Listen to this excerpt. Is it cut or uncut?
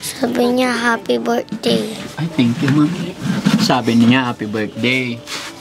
uncut